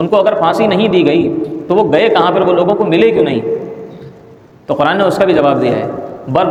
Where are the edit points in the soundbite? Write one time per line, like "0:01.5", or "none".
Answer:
none